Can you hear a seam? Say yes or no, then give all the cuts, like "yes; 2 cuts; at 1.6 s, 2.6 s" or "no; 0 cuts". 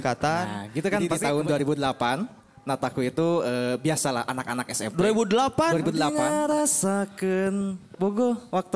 yes; 2 cuts; at 1.1 s, 6.1 s